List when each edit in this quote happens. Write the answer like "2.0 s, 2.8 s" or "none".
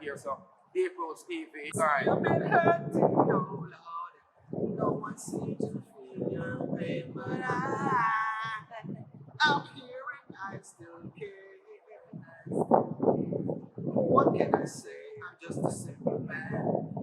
1.9 s